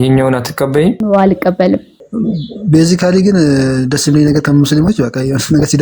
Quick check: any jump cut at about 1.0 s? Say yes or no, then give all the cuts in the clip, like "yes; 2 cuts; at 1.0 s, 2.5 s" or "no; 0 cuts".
yes; 2 cuts; at 1.0 s, 2.0 s